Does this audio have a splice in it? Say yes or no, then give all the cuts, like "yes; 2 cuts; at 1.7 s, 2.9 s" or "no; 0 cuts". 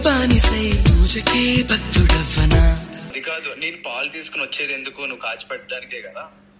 yes; 1 cut; at 3.2 s